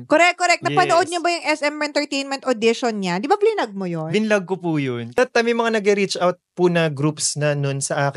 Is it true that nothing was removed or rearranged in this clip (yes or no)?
no